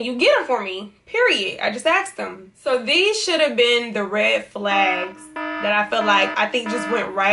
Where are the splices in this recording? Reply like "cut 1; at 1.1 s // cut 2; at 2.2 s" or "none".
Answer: cut 1; at 2.5 s